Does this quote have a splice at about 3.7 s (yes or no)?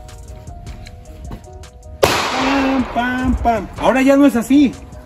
yes